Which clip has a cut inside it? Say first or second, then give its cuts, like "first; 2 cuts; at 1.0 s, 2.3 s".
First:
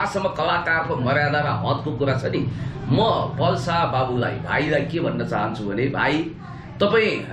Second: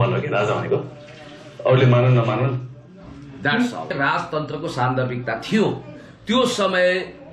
second; 1 cut; at 3.9 s